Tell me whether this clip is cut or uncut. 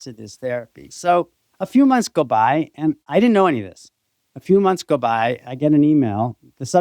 cut